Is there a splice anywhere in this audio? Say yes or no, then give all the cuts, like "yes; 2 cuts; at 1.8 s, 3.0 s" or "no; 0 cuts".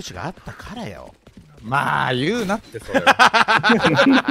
no; 0 cuts